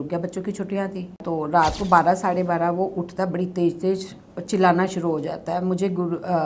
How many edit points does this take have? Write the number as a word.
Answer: one